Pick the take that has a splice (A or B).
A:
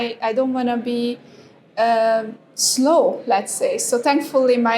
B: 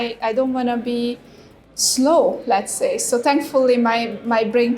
B